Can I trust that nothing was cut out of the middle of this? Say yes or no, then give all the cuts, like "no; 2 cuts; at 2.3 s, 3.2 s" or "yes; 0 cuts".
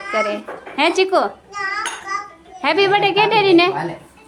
yes; 0 cuts